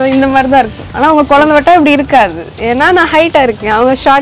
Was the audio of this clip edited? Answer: no; 0 cuts

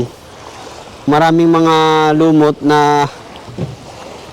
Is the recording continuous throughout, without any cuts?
no; 1 cut; at 1.1 s

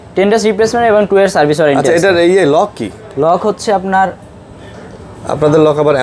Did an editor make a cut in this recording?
no; 0 cuts

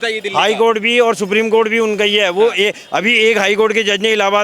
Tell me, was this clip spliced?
no; 0 cuts

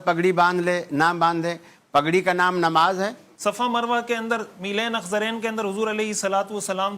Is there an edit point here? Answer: yes; 1 cut; at 3.3 s

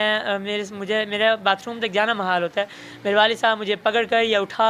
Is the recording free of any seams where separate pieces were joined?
yes; 0 cuts

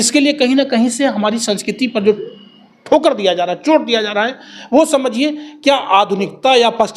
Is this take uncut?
yes; 0 cuts

